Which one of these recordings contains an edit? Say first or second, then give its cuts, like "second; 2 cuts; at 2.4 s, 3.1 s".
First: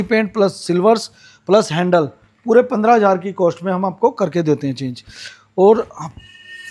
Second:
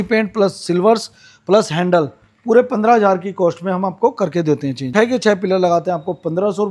second; 1 cut; at 4.9 s